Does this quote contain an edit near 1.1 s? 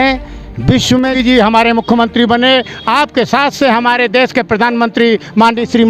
yes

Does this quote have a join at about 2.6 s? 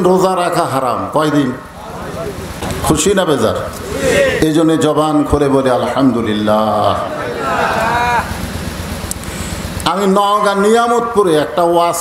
yes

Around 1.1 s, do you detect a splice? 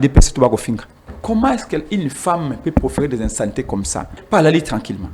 yes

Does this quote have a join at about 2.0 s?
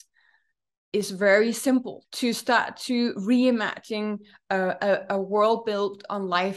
yes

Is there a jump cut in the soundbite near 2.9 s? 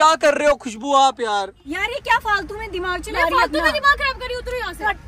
no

